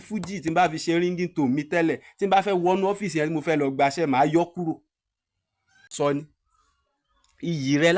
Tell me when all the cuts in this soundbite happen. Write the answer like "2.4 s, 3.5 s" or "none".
5.9 s